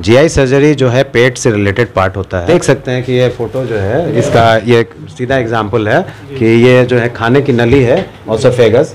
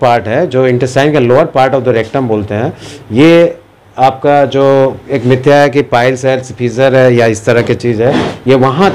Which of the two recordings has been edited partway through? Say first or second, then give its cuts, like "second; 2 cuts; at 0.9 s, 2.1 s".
first; 1 cut; at 2.4 s